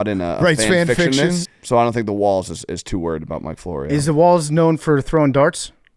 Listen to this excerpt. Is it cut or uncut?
cut